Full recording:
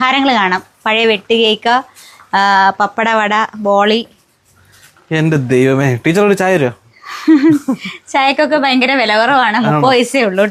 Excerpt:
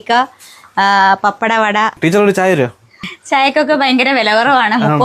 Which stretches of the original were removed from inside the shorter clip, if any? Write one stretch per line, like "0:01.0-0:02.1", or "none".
0:03.5-0:06.0
0:07.1-0:07.9

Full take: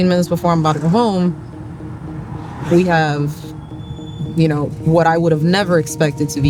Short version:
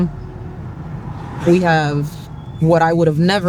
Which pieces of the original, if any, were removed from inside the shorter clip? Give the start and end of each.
0:03.7-0:04.7

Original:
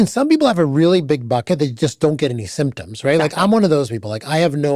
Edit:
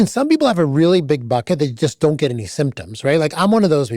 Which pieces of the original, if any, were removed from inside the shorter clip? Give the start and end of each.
none

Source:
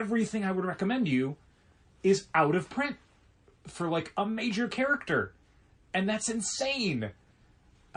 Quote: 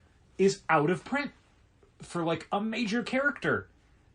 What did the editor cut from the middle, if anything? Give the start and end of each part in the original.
none

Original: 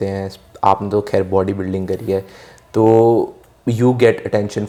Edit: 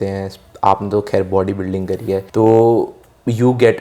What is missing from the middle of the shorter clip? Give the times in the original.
0:02.3-0:02.7

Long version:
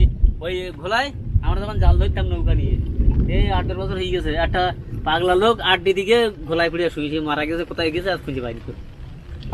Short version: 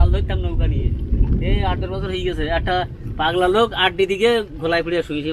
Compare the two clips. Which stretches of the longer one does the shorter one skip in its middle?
none

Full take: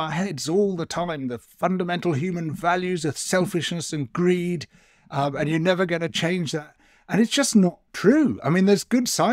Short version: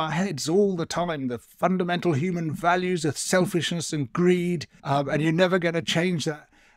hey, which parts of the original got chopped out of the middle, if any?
0:04.7-0:05.0

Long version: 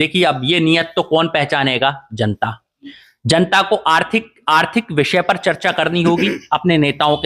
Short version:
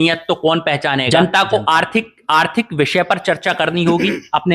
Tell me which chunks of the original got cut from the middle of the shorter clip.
0:01.7-0:03.3

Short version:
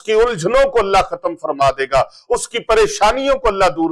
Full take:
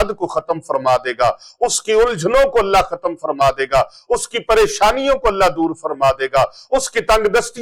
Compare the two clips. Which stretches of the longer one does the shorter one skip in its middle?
none

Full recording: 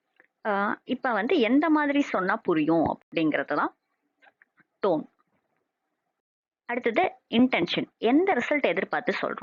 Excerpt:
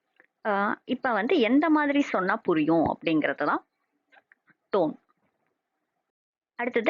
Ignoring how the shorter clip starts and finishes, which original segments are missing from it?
0:03.0-0:03.1

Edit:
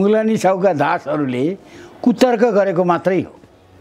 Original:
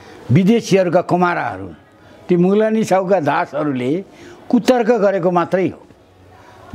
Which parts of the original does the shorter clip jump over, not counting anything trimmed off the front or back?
none

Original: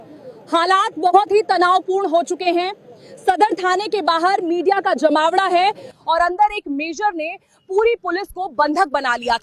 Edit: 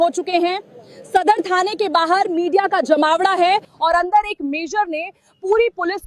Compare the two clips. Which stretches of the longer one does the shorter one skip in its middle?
0:05.8-0:06.0

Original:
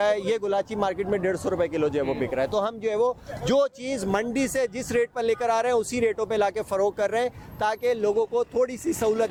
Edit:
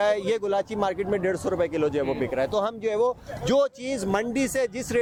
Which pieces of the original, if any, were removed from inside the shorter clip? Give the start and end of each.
none

